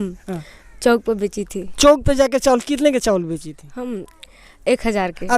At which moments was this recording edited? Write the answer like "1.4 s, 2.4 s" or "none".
none